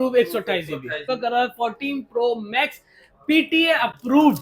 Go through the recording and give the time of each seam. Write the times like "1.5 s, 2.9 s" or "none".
1.0 s